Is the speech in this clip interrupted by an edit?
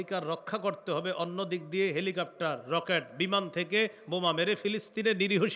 no; 0 cuts

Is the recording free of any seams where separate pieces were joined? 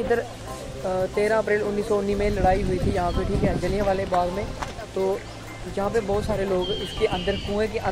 yes; 0 cuts

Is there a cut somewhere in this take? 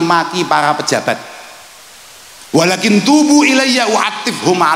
no; 0 cuts

